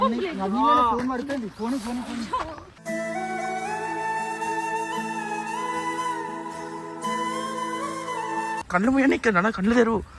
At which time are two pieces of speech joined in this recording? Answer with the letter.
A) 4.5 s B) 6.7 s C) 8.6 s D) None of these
C